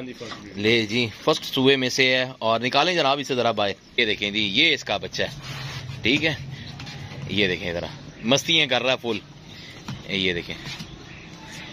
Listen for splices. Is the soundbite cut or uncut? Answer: cut